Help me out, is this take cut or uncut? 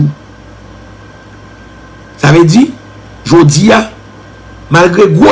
uncut